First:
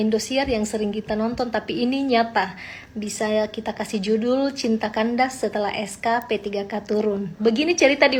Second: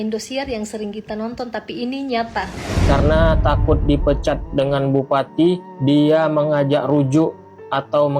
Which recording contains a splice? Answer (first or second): second